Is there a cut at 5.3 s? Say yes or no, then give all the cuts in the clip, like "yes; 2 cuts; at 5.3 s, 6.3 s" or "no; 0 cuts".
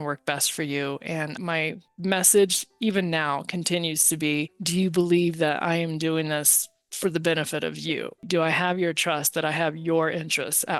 no; 0 cuts